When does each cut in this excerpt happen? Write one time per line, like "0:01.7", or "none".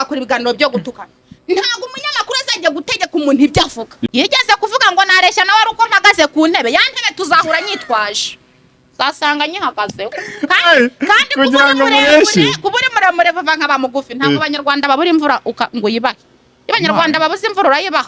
0:03.9